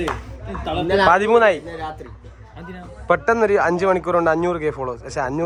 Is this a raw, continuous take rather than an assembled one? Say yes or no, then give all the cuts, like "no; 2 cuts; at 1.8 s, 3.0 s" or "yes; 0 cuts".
yes; 0 cuts